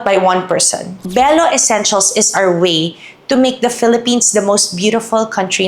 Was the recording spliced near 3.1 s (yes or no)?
no